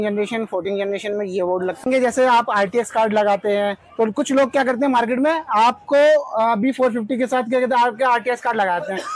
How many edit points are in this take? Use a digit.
1